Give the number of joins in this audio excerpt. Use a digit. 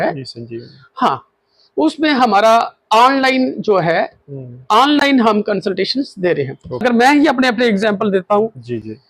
1